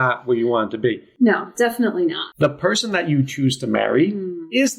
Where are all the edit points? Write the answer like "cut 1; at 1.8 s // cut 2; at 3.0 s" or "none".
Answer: cut 1; at 1.1 s // cut 2; at 2.2 s